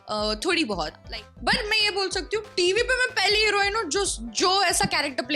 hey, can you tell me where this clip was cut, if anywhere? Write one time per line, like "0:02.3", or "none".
0:01.0